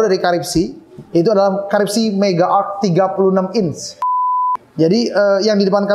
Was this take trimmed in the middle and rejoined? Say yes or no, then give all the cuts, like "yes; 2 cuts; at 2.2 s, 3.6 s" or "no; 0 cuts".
yes; 1 cut; at 4.3 s